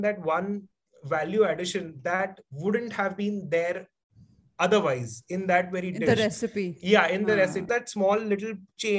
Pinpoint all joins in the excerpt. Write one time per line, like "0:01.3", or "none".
0:07.7

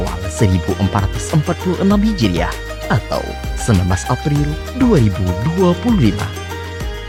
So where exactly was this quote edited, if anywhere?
none

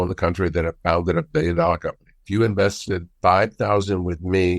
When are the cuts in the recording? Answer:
0:02.2
0:03.1

